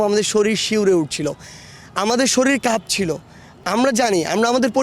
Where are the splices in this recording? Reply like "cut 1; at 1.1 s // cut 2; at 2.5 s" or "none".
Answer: none